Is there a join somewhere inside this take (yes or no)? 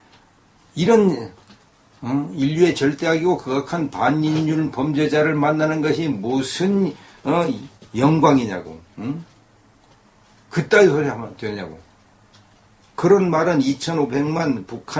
no